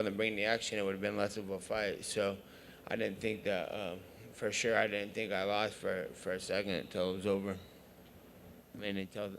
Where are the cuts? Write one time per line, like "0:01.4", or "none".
0:03.2